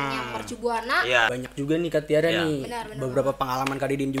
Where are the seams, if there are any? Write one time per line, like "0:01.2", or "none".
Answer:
0:01.4